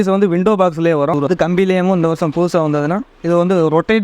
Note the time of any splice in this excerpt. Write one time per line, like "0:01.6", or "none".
0:01.2